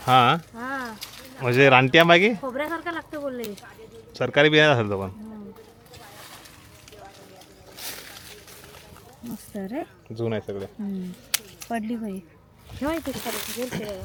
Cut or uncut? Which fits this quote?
uncut